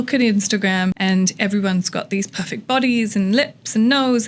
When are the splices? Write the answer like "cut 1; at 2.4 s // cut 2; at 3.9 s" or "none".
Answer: cut 1; at 1.0 s

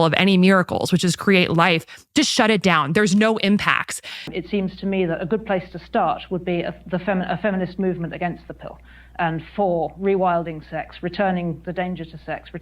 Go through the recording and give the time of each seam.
cut 1; at 4.4 s

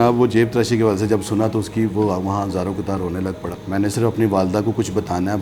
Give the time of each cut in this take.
cut 1; at 3.6 s

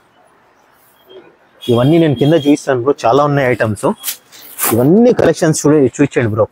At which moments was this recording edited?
none

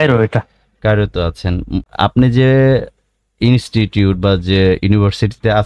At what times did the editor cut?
cut 1; at 1.8 s

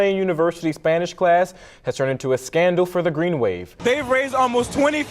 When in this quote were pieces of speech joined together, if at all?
cut 1; at 3.7 s

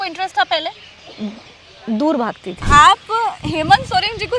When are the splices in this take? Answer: cut 1; at 2.6 s

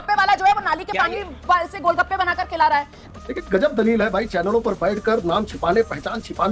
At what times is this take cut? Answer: cut 1; at 3.1 s

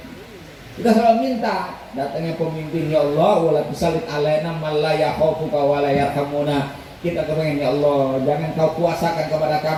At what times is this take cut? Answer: none

